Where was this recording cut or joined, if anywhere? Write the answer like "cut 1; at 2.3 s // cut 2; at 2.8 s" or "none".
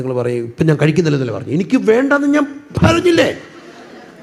none